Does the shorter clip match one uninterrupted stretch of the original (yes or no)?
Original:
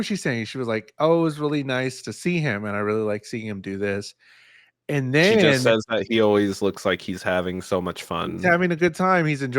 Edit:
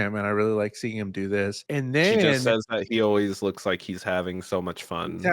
no